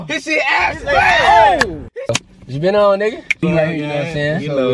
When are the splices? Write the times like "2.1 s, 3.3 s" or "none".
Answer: 2.2 s, 3.4 s